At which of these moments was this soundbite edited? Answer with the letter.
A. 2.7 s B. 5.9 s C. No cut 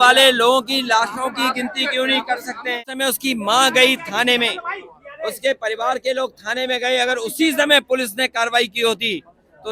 A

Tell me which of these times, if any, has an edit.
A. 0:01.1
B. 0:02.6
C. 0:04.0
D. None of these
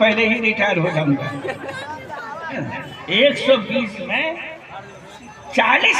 B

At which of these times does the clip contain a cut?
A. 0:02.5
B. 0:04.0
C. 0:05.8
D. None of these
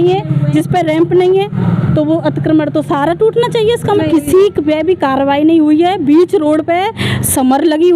B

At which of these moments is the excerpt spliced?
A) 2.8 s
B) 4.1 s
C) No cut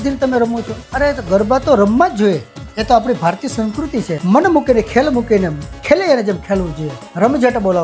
B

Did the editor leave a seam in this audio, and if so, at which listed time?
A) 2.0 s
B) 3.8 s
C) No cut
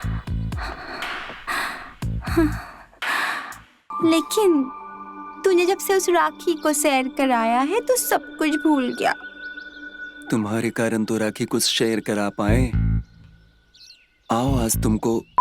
B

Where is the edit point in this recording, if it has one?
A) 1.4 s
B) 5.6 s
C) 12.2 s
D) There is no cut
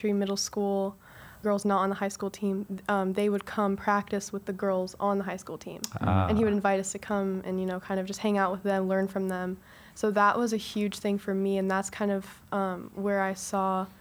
A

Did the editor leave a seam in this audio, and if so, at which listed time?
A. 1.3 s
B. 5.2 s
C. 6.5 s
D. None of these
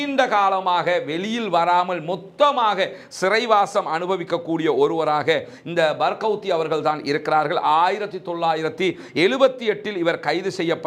D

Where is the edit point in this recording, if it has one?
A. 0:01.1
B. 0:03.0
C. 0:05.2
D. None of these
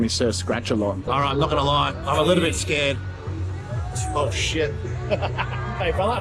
A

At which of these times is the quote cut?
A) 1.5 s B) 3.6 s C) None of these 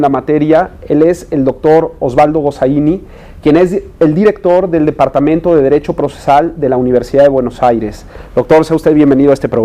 B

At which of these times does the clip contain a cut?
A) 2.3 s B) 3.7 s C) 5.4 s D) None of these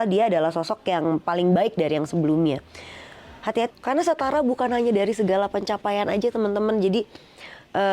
B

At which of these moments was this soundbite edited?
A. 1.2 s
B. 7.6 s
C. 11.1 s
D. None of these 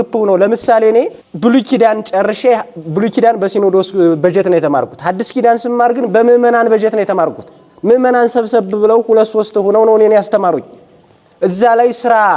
A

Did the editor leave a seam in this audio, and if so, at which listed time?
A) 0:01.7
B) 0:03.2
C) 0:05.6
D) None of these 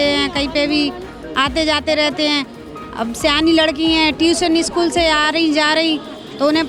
D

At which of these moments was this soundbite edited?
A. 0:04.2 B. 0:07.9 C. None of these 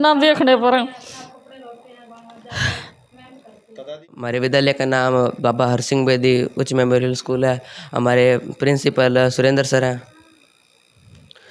A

